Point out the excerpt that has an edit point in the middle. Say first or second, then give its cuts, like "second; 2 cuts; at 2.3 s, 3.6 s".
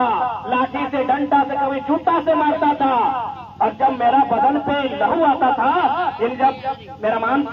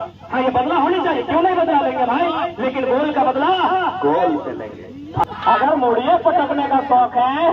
second; 1 cut; at 5.2 s